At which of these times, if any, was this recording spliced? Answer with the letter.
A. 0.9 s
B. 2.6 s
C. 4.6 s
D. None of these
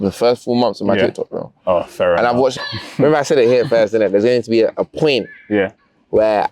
B